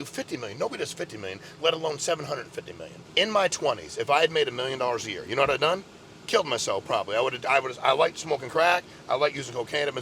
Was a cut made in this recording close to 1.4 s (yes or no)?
no